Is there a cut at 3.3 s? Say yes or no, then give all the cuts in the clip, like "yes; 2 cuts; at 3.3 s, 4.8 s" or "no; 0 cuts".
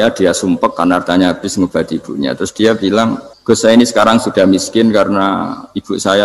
yes; 1 cut; at 3.3 s